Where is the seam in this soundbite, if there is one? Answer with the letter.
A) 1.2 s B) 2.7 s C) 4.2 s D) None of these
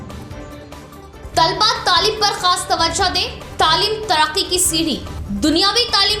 D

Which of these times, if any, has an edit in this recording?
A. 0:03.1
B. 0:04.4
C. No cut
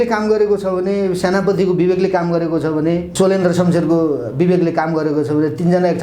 A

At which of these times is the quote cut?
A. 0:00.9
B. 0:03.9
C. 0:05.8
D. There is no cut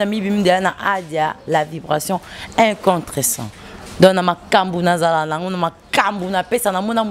D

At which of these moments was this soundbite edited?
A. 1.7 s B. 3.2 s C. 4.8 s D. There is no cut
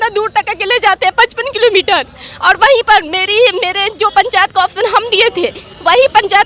D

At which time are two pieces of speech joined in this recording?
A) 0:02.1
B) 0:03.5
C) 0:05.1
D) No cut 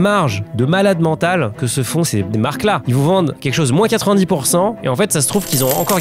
A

